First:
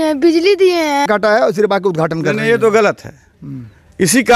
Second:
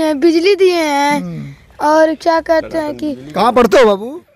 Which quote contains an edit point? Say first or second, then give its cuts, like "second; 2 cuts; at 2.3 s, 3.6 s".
first; 1 cut; at 1.1 s